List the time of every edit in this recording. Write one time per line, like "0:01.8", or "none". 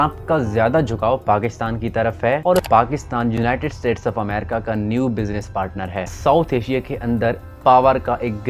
0:02.7
0:06.1